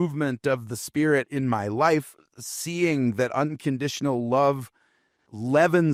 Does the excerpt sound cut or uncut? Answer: uncut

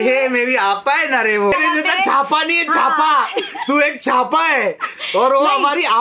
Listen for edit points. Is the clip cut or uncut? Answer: cut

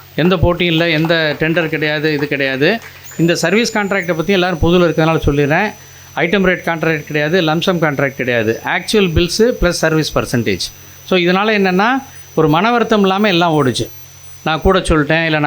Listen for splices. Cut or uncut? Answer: uncut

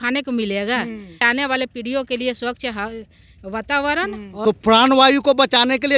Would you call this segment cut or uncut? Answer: cut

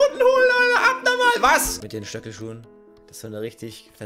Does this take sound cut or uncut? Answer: cut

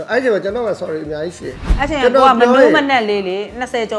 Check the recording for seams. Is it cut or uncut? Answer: cut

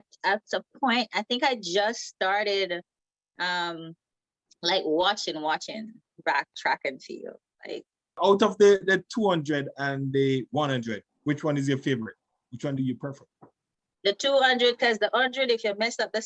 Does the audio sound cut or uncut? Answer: cut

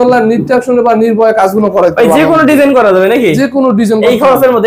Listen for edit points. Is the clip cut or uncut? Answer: uncut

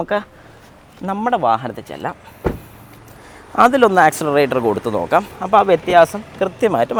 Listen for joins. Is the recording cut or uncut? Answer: uncut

